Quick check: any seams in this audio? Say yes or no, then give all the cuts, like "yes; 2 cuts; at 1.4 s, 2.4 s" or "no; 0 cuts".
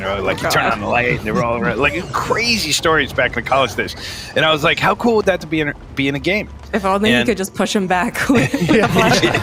no; 0 cuts